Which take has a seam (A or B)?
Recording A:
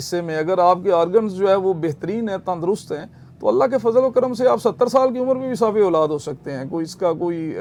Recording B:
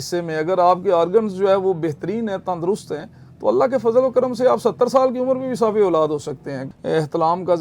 B